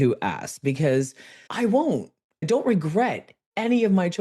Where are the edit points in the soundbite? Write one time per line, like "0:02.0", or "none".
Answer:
0:02.3

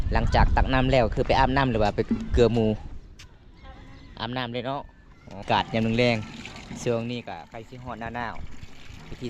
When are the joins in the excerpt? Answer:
0:05.4

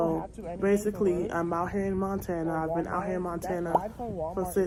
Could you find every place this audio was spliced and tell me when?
none

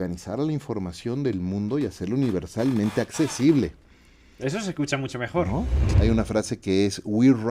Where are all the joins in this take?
0:05.8

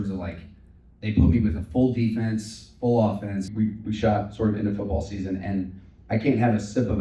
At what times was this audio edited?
0:03.5

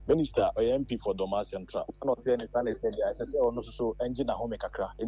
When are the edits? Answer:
none

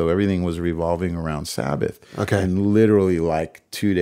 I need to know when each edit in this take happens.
0:02.4

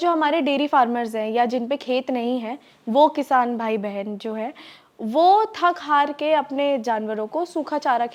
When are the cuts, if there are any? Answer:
none

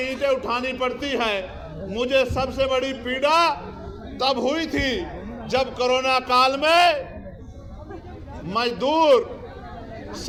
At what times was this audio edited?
none

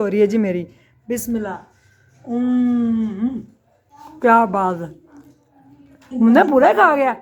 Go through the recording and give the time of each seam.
none

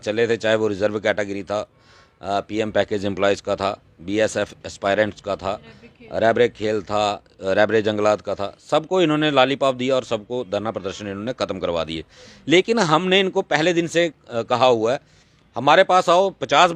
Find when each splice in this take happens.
0:08.1

